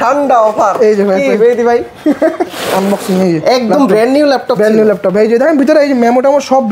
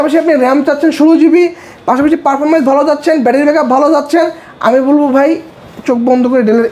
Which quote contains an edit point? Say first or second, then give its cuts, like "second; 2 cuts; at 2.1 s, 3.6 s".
first; 1 cut; at 2.5 s